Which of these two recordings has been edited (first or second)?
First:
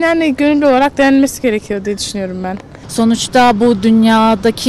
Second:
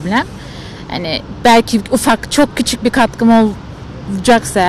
first